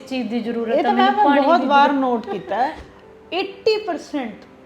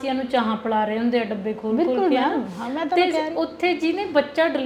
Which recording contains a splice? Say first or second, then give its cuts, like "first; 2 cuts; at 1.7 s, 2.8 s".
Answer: first; 1 cut; at 2.9 s